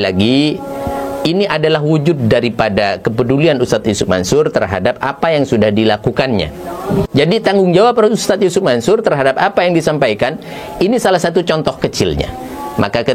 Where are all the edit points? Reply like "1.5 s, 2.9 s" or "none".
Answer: none